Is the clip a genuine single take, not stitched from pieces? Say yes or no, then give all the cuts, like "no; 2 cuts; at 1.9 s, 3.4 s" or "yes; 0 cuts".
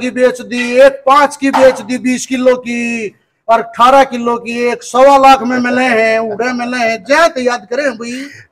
yes; 0 cuts